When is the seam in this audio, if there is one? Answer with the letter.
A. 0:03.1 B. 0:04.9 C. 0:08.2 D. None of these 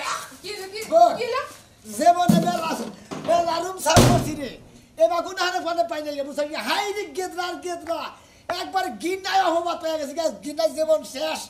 D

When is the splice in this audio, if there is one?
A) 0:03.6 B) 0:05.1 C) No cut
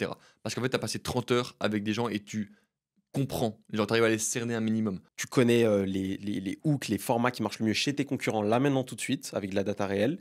B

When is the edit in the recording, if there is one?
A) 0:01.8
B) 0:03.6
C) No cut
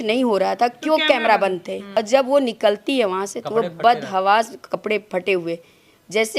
A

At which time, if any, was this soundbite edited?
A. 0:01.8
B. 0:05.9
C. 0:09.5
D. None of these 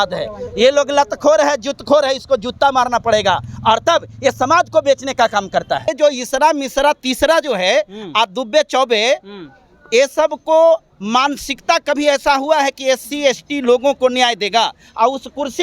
B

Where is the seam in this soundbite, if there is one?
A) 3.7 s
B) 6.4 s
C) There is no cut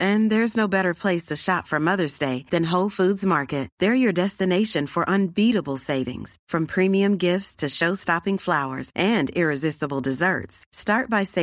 C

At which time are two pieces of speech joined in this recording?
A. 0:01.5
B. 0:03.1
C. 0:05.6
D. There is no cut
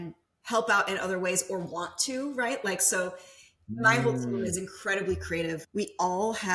C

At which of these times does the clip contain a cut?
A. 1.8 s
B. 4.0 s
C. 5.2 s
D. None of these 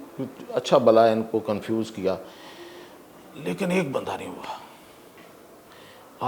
D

